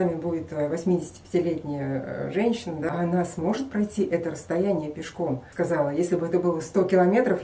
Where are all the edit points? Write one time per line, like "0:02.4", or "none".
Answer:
0:02.9
0:05.5

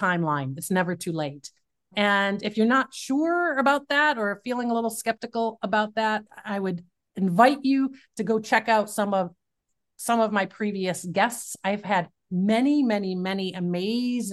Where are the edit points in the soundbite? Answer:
0:01.9
0:06.3

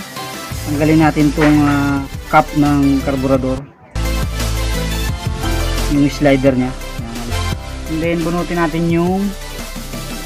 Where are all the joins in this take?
0:02.1
0:07.3

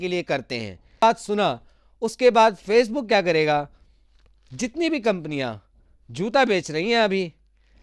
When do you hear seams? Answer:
0:01.0

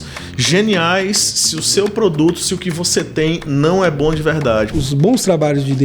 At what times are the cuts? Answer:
0:04.7

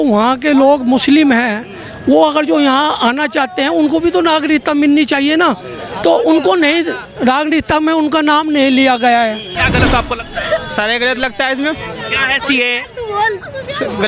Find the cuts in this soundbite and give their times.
0:09.5

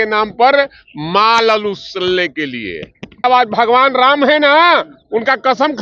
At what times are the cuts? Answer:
0:03.2

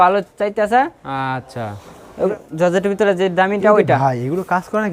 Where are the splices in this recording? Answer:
0:02.3

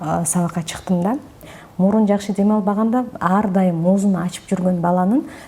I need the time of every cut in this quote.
0:01.5

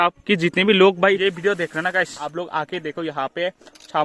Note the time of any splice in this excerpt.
0:01.2
0:02.2

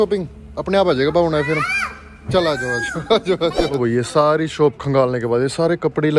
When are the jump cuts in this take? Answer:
0:03.7

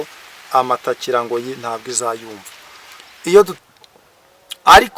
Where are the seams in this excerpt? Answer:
0:03.5

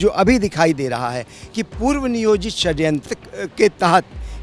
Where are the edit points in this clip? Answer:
0:03.1

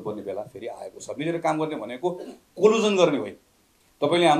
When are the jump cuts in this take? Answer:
none

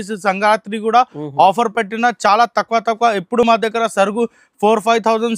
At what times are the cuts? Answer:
none

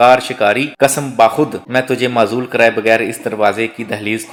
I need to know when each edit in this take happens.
none

